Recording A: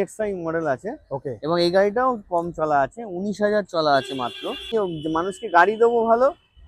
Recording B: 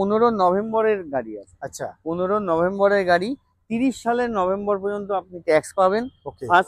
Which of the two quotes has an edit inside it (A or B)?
A